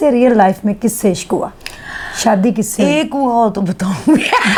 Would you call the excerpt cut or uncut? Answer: uncut